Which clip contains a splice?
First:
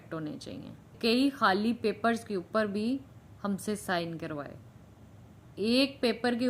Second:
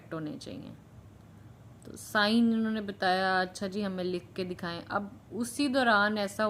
first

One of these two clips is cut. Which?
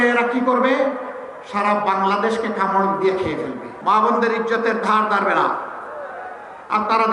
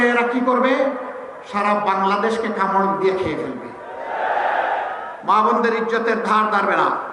first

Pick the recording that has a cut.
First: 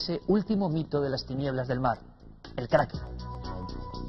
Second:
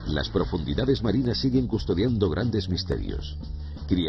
first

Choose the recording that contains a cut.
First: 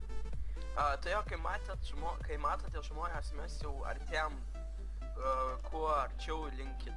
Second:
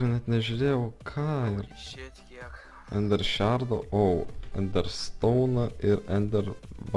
first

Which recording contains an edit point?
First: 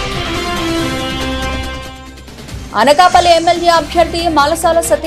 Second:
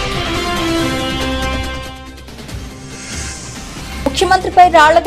second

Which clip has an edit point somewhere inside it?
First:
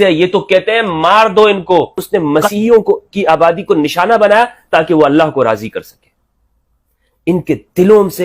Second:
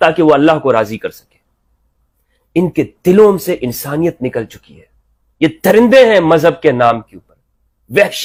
first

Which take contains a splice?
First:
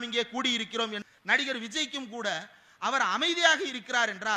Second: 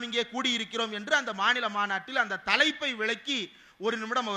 first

